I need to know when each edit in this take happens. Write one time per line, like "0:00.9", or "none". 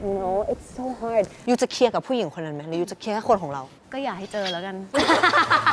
0:01.3